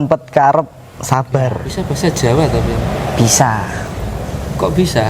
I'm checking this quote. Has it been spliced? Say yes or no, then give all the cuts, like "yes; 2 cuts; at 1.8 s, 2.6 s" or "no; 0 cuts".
yes; 1 cut; at 1.7 s